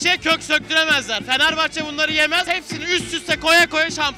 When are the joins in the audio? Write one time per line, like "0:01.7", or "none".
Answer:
0:02.5